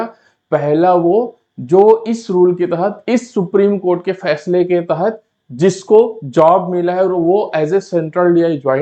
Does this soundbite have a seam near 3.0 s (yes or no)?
no